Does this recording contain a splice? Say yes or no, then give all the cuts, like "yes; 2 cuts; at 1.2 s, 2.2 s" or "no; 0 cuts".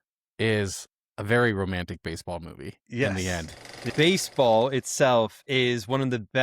yes; 1 cut; at 3.9 s